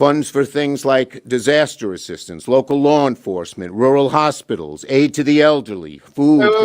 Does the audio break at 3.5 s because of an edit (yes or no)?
yes